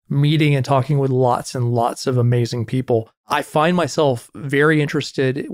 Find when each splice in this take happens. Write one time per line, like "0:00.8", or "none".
0:03.2